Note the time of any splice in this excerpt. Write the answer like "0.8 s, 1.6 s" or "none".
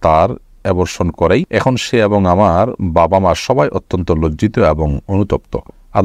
1.5 s